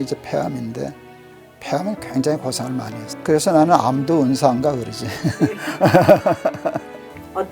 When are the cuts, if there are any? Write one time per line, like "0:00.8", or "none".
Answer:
0:03.0